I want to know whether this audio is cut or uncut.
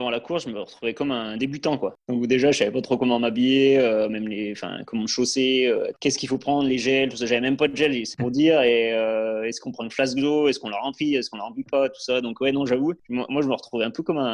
cut